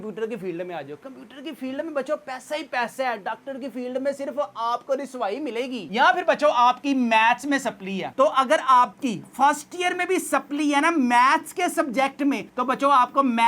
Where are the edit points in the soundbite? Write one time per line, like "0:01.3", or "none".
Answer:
0:05.8
0:08.1